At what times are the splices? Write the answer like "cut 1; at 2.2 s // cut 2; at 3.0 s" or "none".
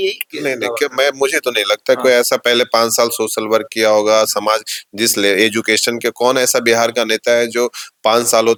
none